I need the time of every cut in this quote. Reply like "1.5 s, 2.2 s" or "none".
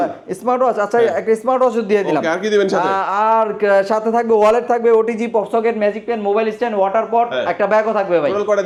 none

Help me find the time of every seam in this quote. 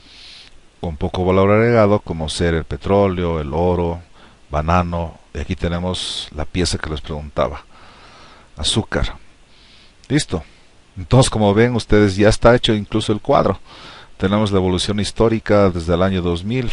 6.2 s

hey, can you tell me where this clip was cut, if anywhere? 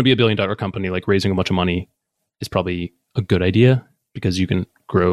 none

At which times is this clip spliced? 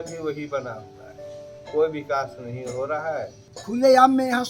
3.5 s

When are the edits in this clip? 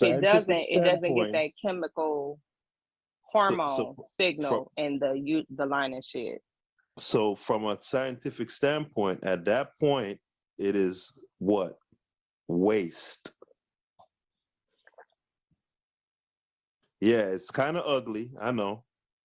14.5 s

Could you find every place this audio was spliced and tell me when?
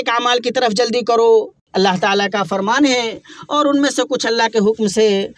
1.6 s

